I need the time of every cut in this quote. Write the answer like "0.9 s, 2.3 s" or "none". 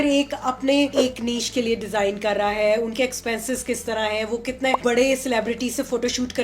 0.9 s, 4.8 s